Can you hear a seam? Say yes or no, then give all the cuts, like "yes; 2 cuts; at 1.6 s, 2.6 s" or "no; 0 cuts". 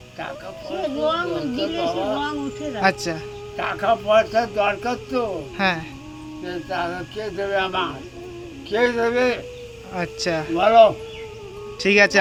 no; 0 cuts